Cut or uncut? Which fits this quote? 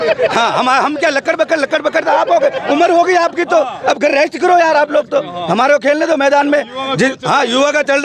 uncut